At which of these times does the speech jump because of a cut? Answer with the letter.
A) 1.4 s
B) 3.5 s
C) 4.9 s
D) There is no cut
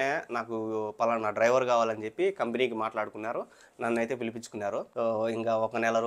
C